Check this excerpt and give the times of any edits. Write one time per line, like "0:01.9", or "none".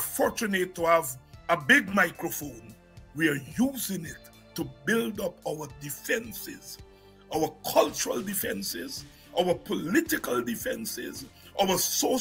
none

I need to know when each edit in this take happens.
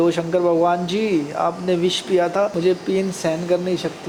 none

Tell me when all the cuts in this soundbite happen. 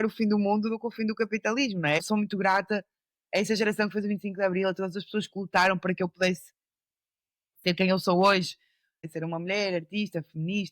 0:02.0
0:09.1

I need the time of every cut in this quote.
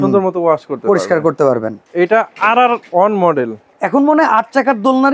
0:01.8
0:03.7

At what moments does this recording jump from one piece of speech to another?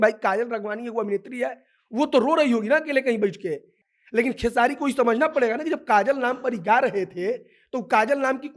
0:03.8

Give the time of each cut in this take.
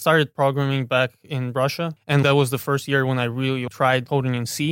0:02.0

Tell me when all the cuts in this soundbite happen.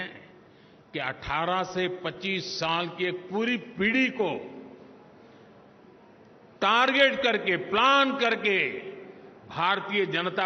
none

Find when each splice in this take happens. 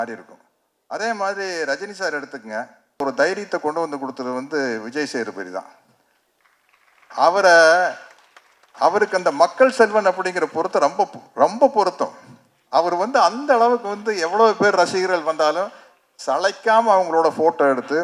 0:03.0

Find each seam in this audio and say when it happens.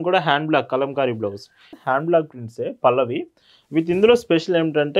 0:01.7

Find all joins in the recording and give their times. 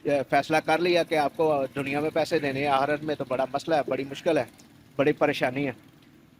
none

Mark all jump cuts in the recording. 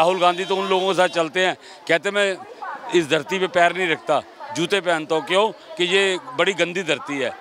none

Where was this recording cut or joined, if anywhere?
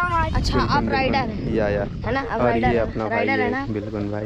none

